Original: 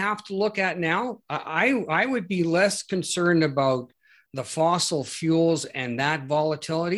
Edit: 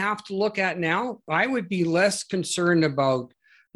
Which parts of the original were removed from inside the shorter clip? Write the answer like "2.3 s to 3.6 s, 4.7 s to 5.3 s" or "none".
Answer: 1.3 s to 1.8 s